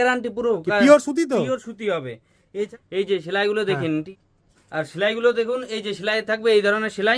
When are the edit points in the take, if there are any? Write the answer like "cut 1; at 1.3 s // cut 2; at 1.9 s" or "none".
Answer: cut 1; at 2.7 s // cut 2; at 4.1 s